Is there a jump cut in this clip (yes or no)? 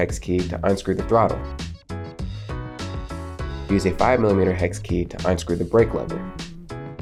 no